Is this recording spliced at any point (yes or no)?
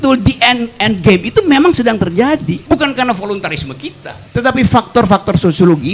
no